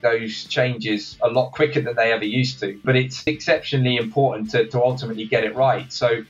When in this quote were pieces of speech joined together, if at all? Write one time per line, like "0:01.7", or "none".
0:02.8